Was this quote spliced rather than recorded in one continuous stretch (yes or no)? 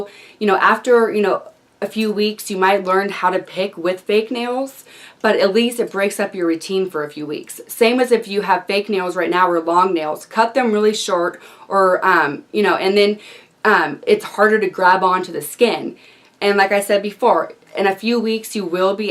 no